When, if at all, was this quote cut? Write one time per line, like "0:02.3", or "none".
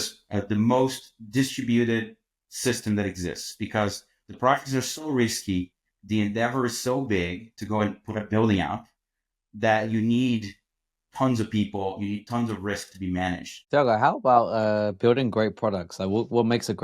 0:13.6